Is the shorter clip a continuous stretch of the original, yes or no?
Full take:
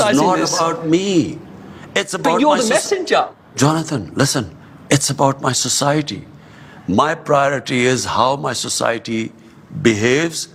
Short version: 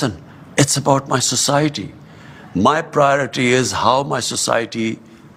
yes